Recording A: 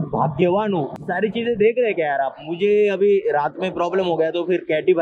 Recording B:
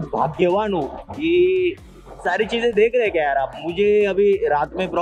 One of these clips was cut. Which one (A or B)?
A